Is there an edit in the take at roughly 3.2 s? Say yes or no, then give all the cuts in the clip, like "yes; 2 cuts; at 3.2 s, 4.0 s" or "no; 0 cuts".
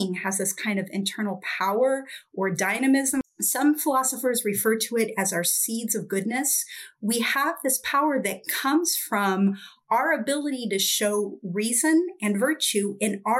yes; 1 cut; at 3.2 s